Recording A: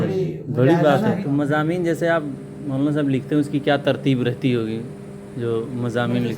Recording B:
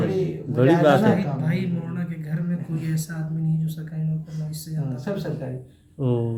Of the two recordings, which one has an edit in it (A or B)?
A